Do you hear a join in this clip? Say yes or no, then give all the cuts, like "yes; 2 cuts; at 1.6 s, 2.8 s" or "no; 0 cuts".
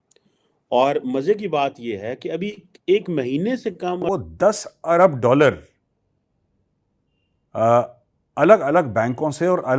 yes; 1 cut; at 4.1 s